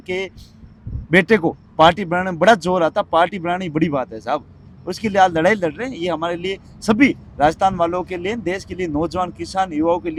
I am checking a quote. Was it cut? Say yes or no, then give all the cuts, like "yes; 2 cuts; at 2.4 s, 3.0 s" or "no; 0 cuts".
no; 0 cuts